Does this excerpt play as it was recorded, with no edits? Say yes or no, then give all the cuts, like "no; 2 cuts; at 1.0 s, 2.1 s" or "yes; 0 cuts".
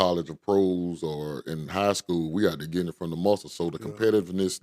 yes; 0 cuts